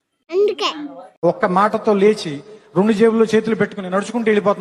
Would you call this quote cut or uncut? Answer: uncut